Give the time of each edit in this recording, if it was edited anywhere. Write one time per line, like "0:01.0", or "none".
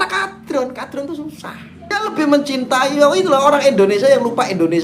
0:02.0